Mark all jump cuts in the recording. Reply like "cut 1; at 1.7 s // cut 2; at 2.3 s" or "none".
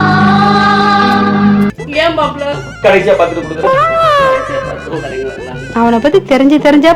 cut 1; at 1.8 s